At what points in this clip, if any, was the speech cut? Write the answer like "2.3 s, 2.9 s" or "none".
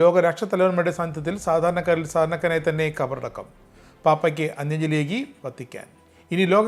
none